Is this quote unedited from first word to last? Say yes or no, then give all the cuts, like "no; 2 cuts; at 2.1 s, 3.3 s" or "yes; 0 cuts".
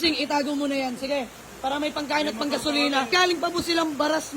no; 1 cut; at 3.1 s